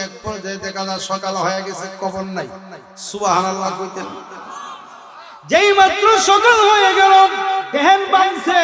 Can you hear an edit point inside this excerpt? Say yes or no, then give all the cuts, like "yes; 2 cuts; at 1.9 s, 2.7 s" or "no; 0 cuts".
yes; 1 cut; at 7.7 s